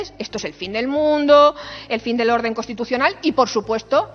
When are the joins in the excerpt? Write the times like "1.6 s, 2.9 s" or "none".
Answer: none

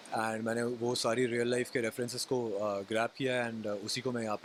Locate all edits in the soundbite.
none

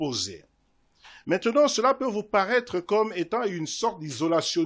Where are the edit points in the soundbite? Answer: none

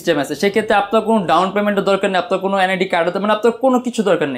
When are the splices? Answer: none

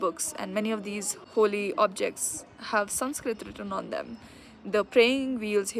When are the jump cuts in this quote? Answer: 1.2 s

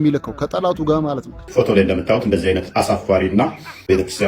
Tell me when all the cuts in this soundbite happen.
1.5 s

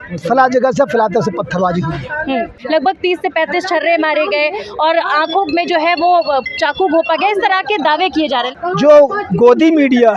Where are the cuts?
2.6 s, 8.5 s

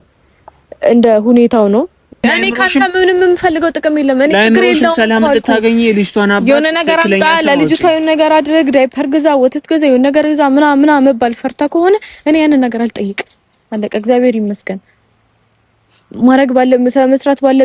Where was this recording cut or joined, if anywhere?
2.2 s

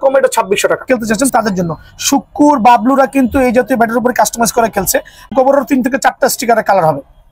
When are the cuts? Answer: 0.8 s, 5.3 s

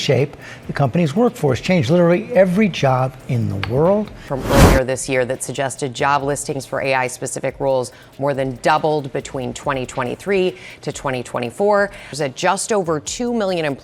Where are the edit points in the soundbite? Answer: 4.3 s, 12.0 s

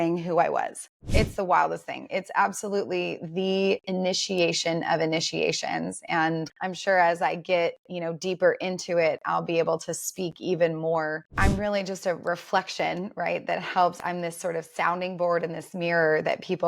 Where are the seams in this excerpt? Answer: 1.0 s, 6.5 s, 11.3 s, 14.0 s

